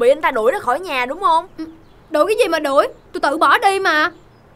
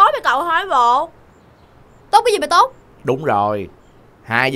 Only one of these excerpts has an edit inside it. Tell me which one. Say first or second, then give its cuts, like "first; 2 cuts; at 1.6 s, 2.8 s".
second; 1 cut; at 2.9 s